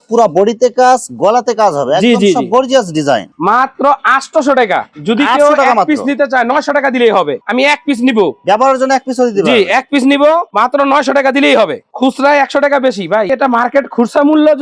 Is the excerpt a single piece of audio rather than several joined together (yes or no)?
yes